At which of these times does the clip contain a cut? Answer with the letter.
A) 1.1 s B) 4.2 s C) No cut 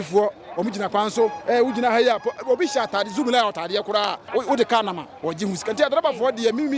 B